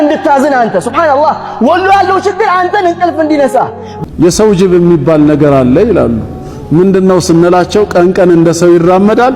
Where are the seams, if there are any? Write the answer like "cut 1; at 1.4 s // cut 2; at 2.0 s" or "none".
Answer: cut 1; at 3.9 s

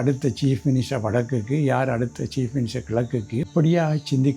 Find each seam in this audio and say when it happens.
cut 1; at 3.5 s

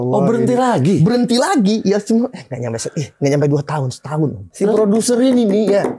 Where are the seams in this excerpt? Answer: cut 1; at 4.5 s

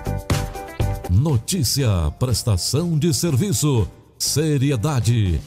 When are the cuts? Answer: cut 1; at 1.0 s

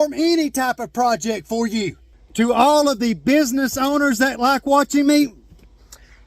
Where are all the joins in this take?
cut 1; at 2.0 s

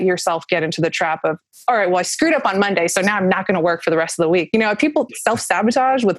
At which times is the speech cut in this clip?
cut 1; at 5.1 s

